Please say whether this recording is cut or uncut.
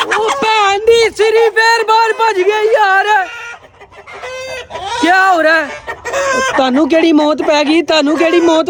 uncut